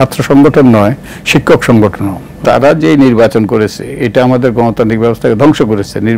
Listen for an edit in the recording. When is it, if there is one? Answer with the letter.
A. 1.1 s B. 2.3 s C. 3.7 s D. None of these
B